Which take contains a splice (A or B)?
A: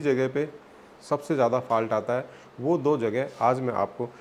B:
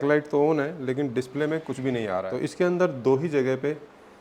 B